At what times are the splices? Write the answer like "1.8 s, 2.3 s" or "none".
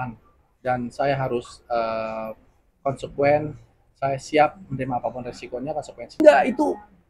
6.2 s